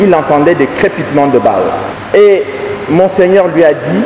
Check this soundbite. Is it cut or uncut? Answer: cut